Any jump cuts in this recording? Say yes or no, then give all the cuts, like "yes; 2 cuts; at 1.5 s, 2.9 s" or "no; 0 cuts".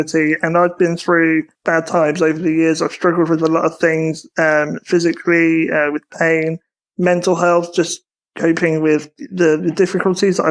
yes; 1 cut; at 1.5 s